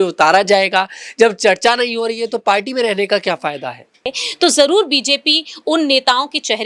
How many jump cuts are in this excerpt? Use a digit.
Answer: 1